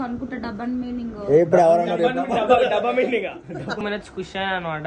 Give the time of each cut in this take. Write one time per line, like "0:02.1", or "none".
0:03.8